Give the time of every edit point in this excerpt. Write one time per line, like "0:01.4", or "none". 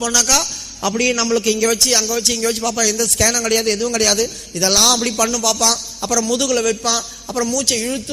none